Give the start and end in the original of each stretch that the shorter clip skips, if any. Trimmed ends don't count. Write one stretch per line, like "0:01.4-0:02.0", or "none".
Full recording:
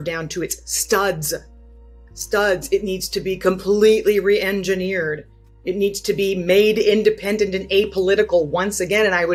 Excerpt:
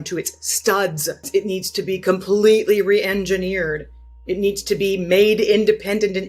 0:01.5-0:02.6